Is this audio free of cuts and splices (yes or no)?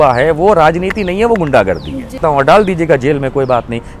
no